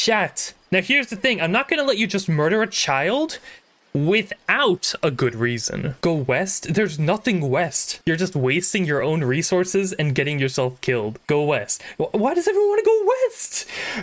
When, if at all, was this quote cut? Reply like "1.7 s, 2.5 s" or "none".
5.9 s, 8.0 s, 11.2 s